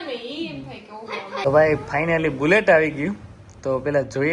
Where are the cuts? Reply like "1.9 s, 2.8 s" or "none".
1.4 s